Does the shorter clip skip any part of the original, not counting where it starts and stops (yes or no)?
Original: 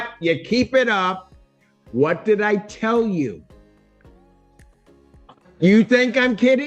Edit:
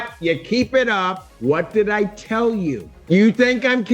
yes